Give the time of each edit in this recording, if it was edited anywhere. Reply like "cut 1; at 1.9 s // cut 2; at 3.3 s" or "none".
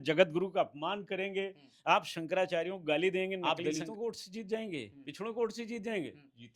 cut 1; at 3.4 s